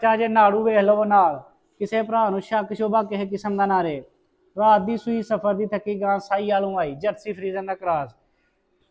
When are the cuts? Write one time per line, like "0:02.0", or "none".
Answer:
none